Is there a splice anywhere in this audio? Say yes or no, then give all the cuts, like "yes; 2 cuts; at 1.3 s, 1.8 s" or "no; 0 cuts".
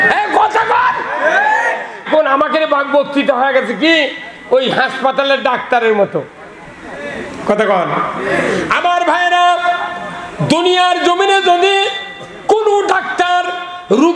yes; 1 cut; at 2.1 s